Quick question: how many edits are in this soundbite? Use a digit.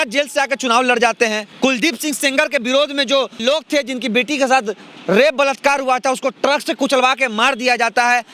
2